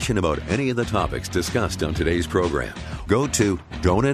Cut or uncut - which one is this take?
cut